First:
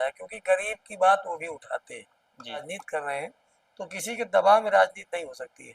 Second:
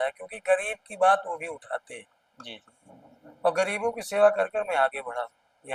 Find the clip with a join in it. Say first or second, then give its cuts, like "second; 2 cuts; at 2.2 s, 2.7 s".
first; 1 cut; at 2.6 s